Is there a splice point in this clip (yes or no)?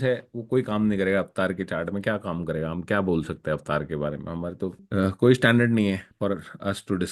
yes